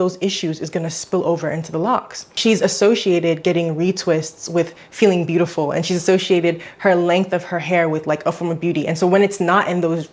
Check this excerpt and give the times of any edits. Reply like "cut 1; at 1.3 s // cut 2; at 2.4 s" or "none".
cut 1; at 2.2 s